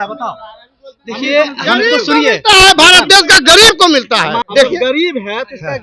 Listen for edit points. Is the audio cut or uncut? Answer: cut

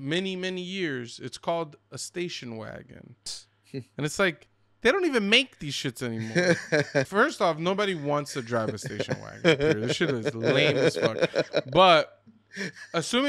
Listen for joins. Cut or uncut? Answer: cut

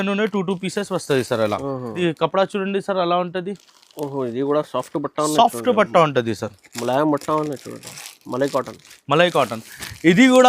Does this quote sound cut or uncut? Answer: cut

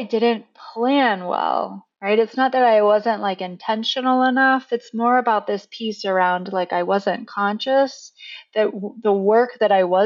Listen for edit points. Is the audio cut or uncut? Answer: uncut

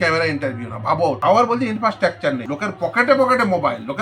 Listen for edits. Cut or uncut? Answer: cut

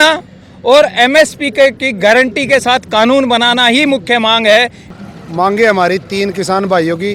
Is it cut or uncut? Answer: cut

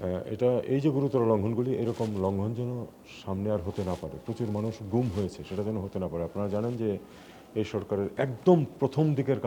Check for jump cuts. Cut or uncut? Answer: uncut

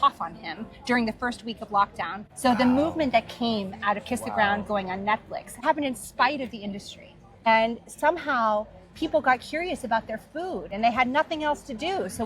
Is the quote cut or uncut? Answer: cut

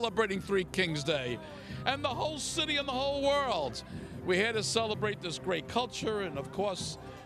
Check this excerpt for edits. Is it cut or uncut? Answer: uncut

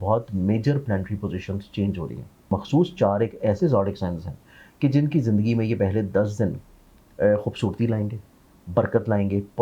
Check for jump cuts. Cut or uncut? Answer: cut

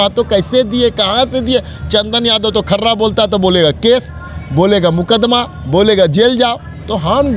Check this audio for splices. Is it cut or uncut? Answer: uncut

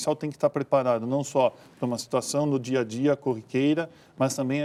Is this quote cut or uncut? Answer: uncut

